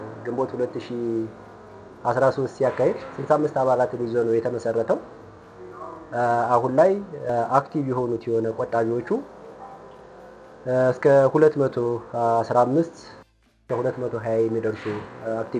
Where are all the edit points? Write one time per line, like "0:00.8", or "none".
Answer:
none